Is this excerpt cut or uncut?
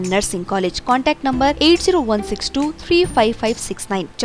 uncut